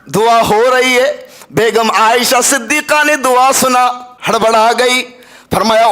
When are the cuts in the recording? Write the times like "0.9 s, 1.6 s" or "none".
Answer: 4.1 s